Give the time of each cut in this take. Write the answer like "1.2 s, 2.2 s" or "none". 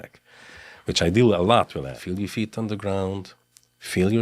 2.0 s